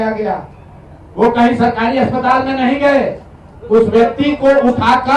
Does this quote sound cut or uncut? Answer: uncut